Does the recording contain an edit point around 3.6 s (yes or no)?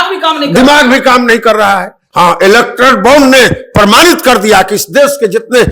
no